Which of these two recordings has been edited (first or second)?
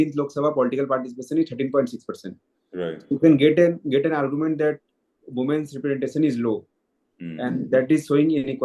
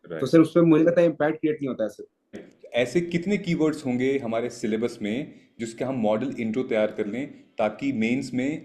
second